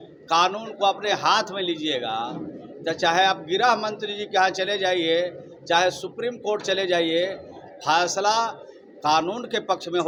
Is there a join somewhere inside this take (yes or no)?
no